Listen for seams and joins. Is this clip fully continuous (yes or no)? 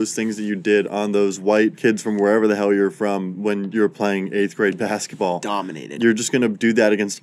no